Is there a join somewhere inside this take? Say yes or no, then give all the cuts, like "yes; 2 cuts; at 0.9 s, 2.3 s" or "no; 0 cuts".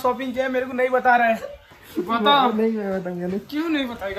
no; 0 cuts